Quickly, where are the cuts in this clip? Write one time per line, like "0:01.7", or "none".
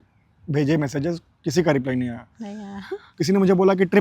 0:03.0